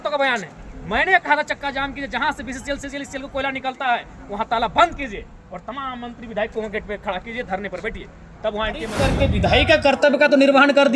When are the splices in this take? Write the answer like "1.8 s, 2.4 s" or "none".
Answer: 9.0 s